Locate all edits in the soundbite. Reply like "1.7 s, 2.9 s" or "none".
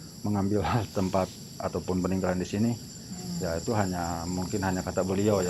none